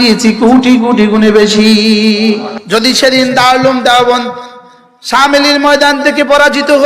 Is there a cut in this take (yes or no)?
yes